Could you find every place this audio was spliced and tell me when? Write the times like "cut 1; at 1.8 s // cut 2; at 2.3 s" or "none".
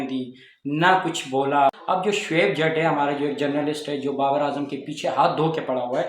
cut 1; at 1.8 s